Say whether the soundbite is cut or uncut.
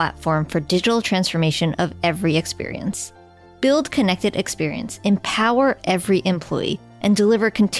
uncut